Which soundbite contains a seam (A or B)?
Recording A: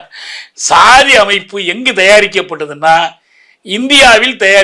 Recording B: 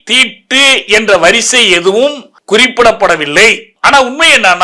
B